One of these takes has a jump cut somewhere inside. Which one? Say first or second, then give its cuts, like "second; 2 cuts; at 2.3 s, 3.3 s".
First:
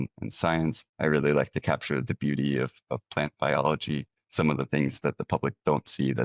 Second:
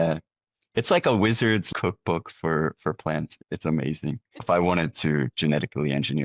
second; 2 cuts; at 1.7 s, 4.4 s